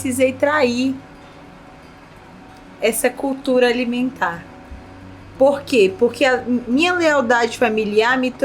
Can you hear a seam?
no; 0 cuts

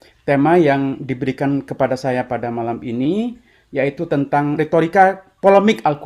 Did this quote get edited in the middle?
yes; 1 cut; at 4.5 s

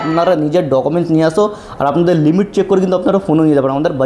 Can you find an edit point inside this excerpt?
no; 0 cuts

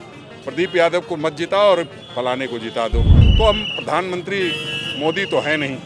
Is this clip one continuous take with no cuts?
no; 1 cut; at 3.2 s

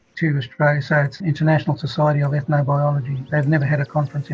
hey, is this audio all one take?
no; 2 cuts; at 1.1 s, 3.2 s

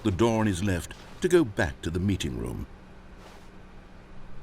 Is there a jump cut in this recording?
yes; 1 cut; at 2.7 s

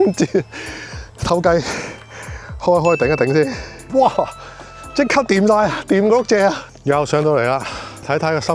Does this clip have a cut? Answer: no; 0 cuts

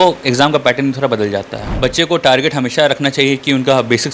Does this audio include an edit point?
yes; 1 cut; at 1.6 s

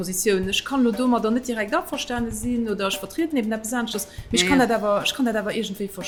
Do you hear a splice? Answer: no; 0 cuts

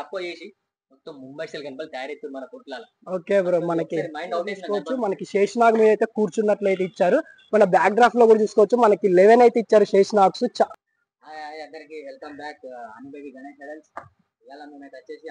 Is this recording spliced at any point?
yes; 2 cuts; at 4.6 s, 10.7 s

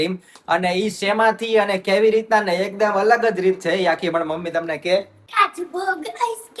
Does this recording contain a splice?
yes; 1 cut; at 5.3 s

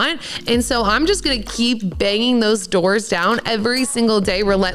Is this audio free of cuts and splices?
yes; 0 cuts

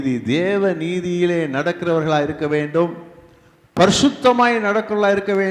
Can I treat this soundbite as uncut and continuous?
yes; 0 cuts

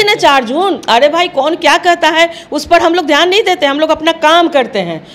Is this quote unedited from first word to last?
yes; 0 cuts

